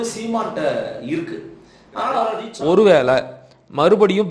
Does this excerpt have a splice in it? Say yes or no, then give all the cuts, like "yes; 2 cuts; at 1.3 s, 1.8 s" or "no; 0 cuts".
yes; 1 cut; at 2.5 s